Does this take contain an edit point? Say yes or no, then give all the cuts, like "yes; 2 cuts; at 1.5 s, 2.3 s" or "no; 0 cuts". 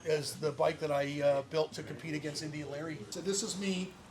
yes; 1 cut; at 3.0 s